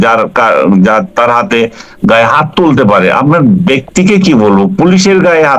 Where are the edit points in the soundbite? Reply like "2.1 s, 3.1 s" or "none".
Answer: none